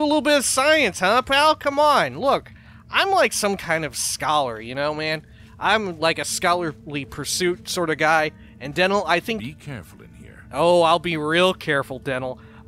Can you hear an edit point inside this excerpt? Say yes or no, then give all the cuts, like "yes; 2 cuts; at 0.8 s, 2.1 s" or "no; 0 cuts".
no; 0 cuts